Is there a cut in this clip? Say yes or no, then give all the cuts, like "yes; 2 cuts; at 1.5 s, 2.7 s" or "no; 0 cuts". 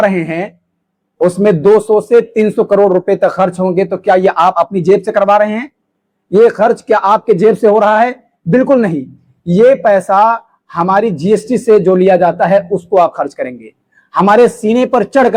no; 0 cuts